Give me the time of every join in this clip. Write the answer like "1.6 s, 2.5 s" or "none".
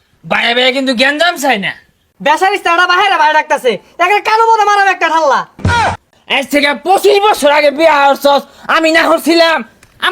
2.0 s, 6.0 s